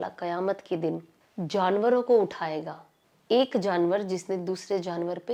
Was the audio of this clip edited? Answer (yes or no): no